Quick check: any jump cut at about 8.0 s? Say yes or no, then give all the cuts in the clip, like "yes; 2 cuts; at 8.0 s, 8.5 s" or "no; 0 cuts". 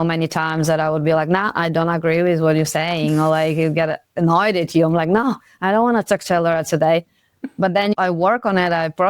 yes; 1 cut; at 8.0 s